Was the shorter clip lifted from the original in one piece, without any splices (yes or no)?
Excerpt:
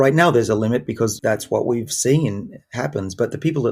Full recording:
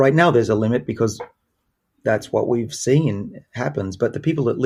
no